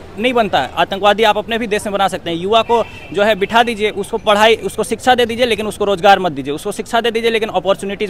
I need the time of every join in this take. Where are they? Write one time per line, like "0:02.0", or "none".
none